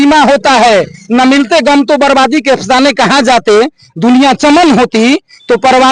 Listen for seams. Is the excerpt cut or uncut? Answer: uncut